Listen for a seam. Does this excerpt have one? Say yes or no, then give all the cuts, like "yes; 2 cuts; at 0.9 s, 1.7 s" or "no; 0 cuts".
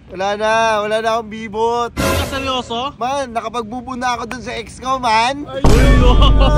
no; 0 cuts